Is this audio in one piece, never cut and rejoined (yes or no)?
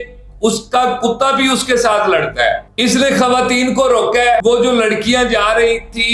no